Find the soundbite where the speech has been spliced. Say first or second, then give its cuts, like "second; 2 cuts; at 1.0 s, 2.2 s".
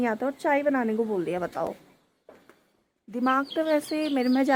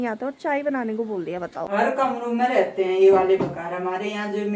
second; 1 cut; at 1.6 s